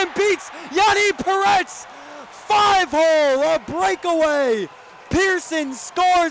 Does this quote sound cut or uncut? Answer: uncut